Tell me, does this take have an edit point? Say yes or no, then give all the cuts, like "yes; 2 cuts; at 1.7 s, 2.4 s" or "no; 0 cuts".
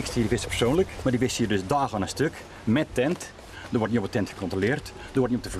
yes; 2 cuts; at 0.9 s, 3.6 s